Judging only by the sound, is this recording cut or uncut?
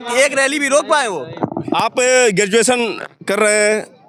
uncut